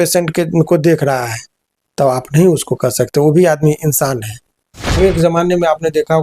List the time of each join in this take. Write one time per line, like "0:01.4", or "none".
0:05.0